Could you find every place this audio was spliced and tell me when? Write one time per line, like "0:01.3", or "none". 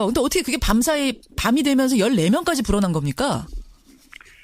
0:02.9